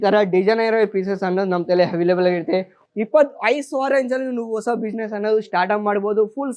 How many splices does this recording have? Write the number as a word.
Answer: one